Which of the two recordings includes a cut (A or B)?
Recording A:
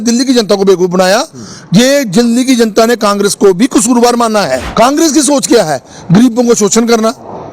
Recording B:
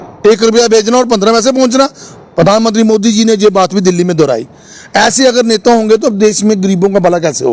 A